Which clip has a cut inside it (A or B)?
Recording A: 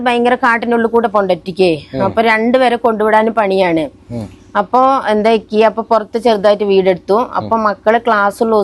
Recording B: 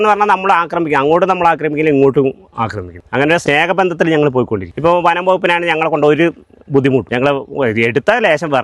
B